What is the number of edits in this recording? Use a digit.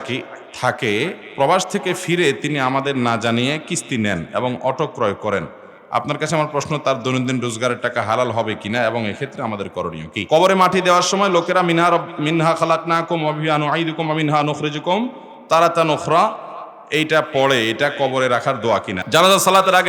2